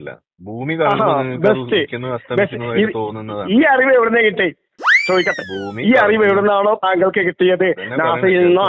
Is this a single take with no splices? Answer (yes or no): yes